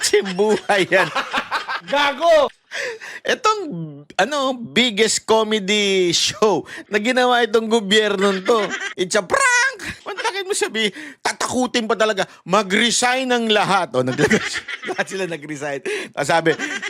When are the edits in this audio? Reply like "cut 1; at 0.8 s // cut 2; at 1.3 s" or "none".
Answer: cut 1; at 6.8 s // cut 2; at 8.8 s // cut 3; at 10.0 s